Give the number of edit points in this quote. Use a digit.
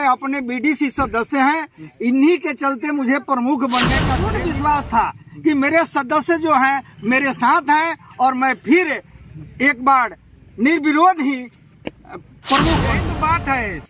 2